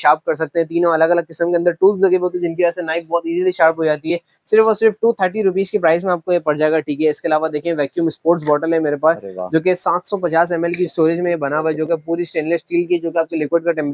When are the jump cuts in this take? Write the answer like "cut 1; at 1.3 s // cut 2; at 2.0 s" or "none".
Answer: none